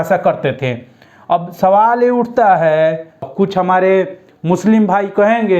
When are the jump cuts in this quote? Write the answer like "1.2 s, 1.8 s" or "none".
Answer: 3.1 s